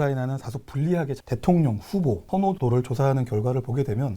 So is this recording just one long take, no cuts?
no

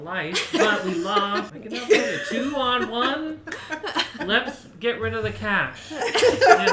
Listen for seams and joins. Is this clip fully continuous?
no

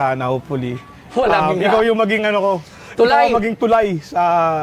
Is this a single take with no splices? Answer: yes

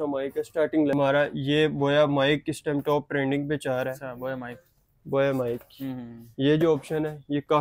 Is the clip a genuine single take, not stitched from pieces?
no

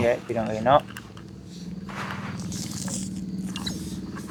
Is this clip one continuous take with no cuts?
yes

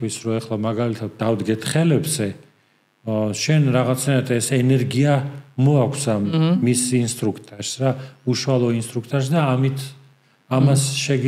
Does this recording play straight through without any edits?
yes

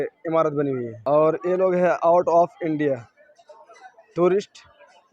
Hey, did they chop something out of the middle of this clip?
yes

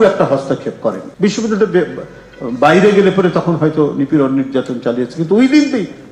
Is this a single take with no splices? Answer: no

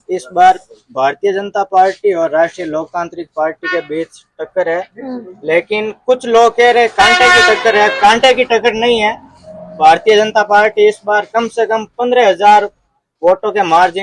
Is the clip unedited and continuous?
yes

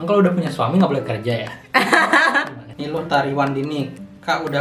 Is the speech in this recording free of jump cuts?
no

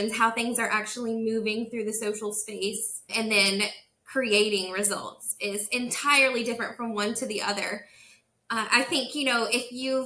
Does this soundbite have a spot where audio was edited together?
yes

